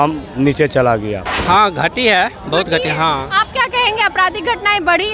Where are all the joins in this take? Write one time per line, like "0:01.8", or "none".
0:01.3